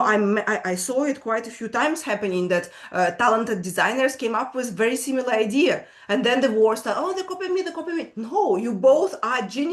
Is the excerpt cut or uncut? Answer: uncut